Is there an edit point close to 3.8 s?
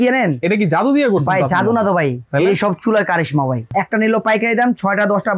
yes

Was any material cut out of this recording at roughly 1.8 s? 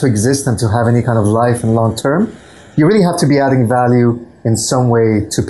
no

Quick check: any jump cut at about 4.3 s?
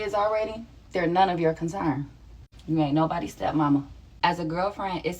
yes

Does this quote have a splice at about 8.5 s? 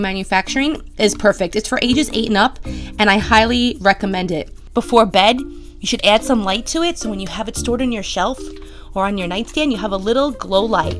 no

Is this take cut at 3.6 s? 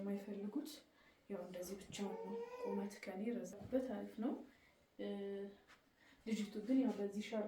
yes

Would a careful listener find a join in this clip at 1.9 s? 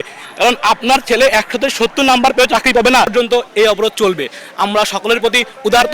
no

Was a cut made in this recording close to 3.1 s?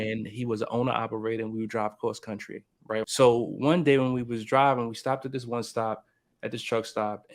yes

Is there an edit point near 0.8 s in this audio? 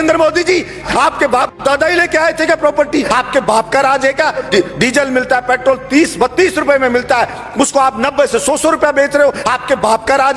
yes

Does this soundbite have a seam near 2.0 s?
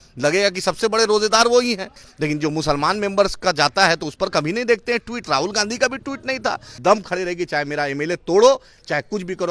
yes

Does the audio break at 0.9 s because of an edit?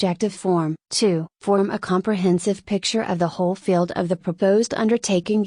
yes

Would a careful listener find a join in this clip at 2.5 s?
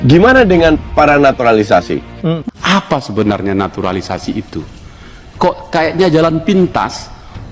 yes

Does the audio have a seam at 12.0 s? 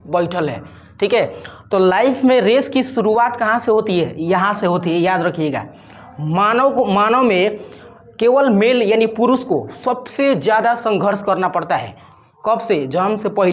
no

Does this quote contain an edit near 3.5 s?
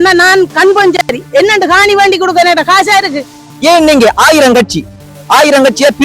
yes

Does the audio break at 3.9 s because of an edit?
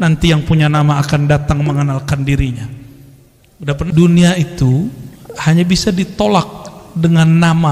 yes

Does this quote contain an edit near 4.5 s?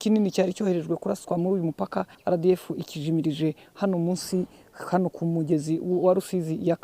no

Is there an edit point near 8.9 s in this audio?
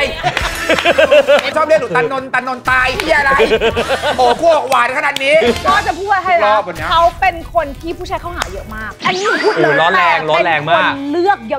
yes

